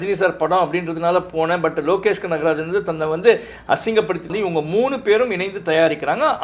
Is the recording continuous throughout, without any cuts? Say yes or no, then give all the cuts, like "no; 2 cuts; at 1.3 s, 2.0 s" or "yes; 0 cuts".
no; 1 cut; at 4.3 s